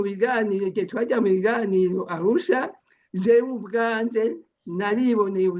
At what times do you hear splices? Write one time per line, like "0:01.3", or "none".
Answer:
none